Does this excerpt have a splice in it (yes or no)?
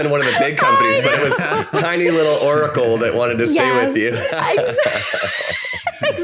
no